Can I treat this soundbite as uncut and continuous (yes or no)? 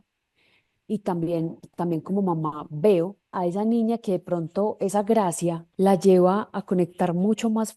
no